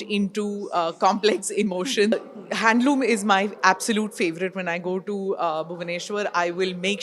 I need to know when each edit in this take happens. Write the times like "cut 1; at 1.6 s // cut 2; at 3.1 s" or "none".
cut 1; at 2.1 s

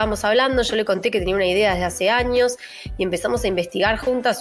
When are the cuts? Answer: none

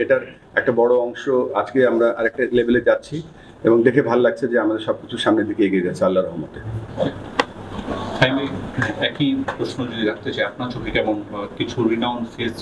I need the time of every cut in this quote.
none

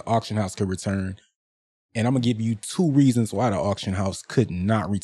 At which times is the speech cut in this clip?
none

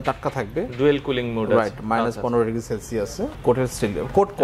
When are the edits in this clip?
cut 1; at 3.3 s

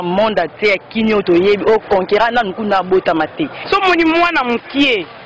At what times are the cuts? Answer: cut 1; at 3.5 s

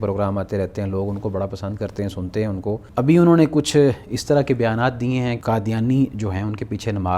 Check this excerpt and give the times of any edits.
cut 1; at 2.9 s // cut 2; at 5.4 s

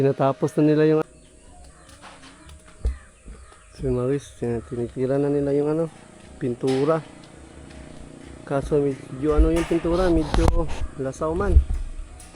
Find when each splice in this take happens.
cut 1; at 1.0 s

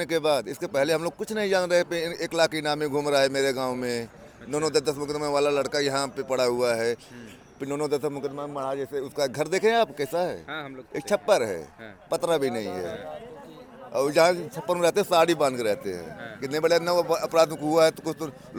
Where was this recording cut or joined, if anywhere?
none

